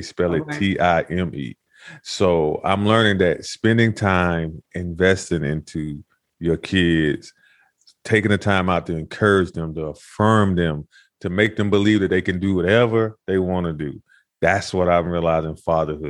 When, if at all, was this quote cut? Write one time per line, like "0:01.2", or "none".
none